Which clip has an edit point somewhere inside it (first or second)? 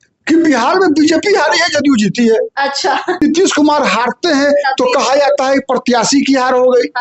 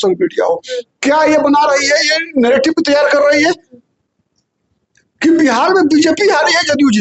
first